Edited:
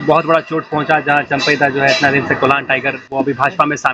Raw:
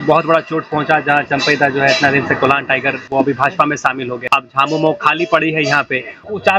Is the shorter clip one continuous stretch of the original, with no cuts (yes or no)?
yes